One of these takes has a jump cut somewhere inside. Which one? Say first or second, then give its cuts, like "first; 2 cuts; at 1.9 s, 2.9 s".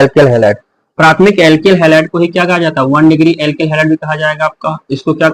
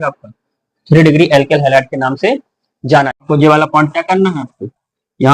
second; 1 cut; at 3.2 s